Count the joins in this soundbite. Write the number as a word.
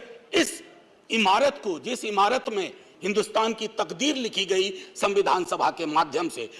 zero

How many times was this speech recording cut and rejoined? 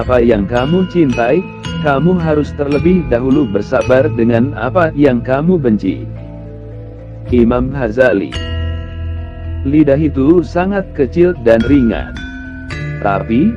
zero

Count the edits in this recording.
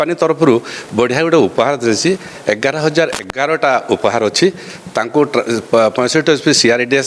zero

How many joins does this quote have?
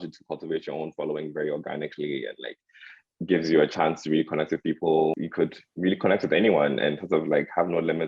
one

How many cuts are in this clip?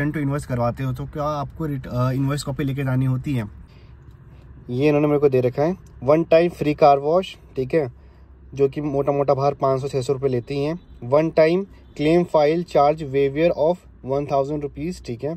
one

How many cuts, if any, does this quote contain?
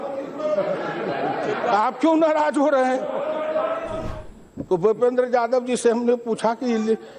one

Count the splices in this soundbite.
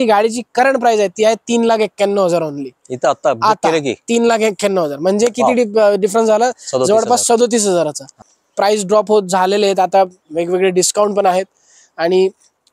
zero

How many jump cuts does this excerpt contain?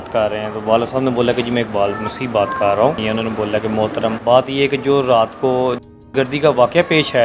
two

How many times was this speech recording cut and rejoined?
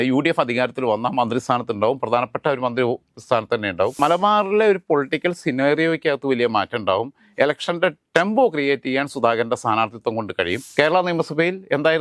two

